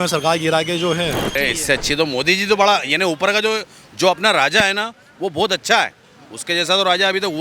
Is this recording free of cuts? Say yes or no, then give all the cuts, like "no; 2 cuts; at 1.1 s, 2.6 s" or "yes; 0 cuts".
no; 1 cut; at 1.3 s